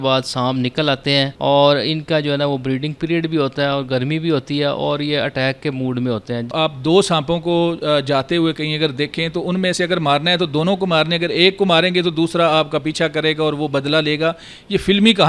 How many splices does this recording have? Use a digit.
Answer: 2